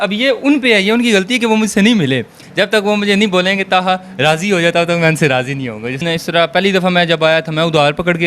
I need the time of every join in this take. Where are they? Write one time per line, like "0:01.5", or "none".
0:02.4
0:05.9